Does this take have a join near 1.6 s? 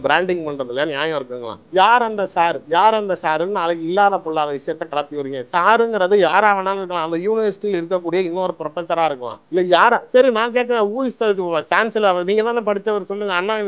yes; 2 cuts; at 1.6 s, 9.3 s

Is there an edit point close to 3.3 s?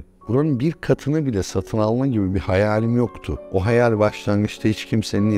yes; 1 cut; at 3.3 s

